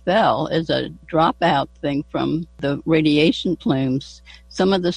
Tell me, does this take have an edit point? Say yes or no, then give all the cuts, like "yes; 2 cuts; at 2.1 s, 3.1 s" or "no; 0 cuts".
yes; 2 cuts; at 1.0 s, 2.6 s